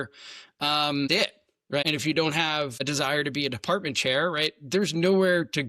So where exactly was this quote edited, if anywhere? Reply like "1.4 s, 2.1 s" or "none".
1.9 s, 2.8 s